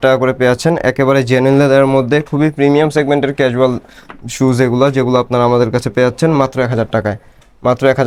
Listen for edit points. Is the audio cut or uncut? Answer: uncut